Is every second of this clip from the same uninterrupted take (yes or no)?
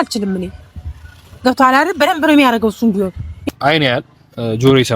no